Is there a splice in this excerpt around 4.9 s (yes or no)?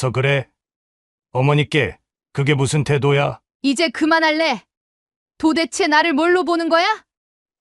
no